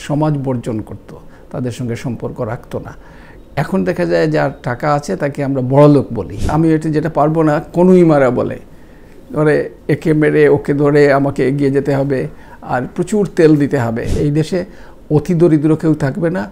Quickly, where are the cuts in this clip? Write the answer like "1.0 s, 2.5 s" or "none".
6.5 s, 14.2 s